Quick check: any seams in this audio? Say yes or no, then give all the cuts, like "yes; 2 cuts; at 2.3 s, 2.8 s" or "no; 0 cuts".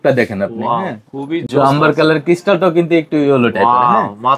no; 0 cuts